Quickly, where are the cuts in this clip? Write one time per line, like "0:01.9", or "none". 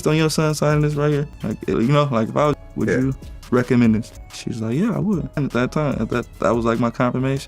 0:02.5
0:05.4